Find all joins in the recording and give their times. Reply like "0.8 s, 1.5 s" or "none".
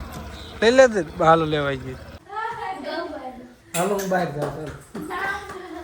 2.1 s